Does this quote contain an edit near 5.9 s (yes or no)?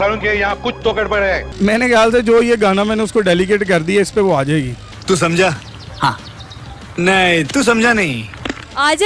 no